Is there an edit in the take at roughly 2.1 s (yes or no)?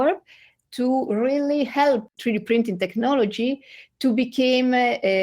yes